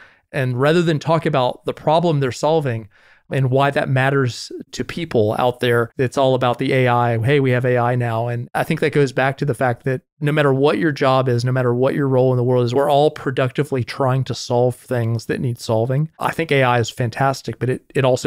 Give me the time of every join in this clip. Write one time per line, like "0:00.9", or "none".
0:05.9
0:08.4
0:12.7
0:16.1

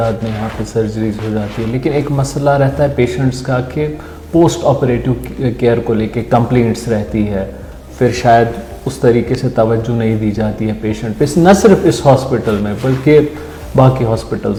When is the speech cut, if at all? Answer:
none

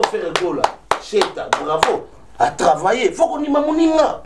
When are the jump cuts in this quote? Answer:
none

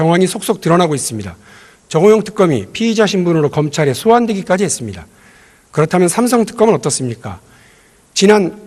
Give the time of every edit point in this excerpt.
0:06.3

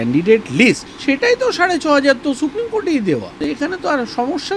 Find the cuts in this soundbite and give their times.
0:00.9
0:03.5

